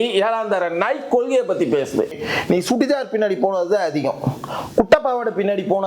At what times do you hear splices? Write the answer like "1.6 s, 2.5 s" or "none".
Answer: 2.2 s